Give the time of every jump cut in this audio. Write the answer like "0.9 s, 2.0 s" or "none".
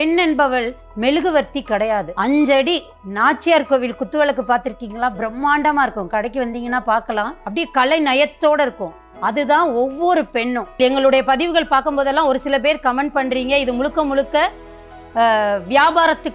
2.1 s, 7.4 s, 10.8 s